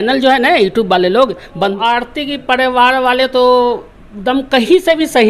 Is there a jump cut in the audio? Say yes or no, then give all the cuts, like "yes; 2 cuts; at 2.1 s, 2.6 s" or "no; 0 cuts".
yes; 1 cut; at 1.8 s